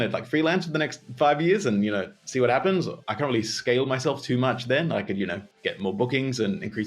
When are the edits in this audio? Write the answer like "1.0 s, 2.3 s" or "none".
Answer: 3.0 s